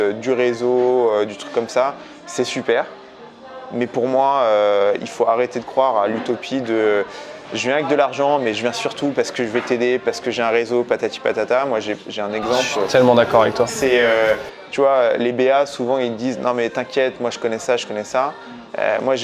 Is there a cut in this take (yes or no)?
no